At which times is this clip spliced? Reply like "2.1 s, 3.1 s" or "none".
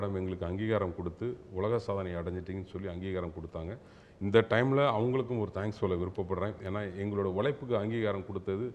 none